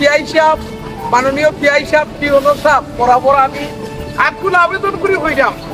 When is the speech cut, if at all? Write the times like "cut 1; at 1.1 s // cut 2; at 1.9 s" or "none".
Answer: none